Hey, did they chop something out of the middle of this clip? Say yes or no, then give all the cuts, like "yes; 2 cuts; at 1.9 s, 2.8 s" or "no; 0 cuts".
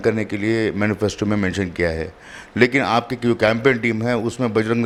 no; 0 cuts